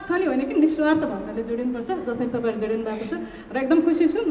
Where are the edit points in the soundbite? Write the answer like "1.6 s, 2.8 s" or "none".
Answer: none